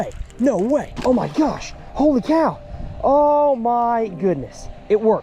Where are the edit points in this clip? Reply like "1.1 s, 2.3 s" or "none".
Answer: 0.9 s